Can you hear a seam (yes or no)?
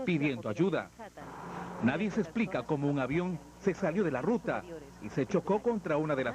yes